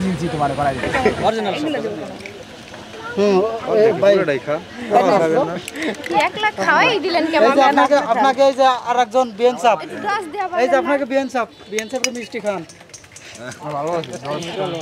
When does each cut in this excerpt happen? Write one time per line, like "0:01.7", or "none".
0:01.0